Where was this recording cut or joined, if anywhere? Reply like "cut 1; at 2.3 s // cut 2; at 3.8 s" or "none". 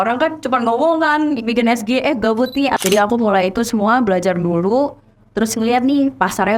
cut 1; at 2.8 s